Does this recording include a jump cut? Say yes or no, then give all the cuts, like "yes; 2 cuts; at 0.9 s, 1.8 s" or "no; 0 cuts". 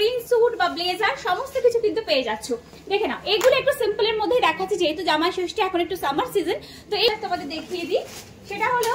yes; 1 cut; at 7.1 s